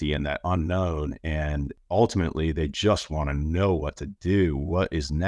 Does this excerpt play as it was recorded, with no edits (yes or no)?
no